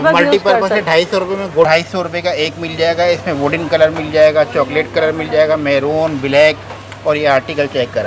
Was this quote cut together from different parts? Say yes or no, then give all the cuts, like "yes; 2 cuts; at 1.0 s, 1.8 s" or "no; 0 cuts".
yes; 1 cut; at 1.7 s